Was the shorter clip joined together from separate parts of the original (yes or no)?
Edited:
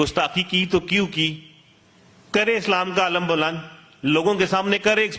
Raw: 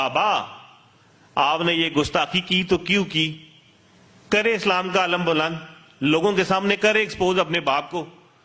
no